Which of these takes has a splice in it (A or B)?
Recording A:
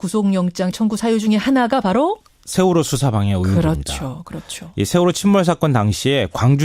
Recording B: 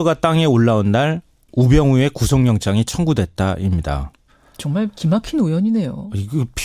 B